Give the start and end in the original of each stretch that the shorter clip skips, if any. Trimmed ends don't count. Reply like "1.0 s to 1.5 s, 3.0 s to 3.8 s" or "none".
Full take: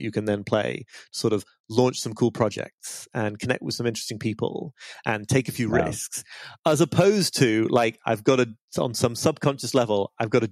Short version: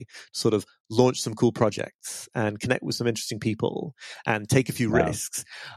none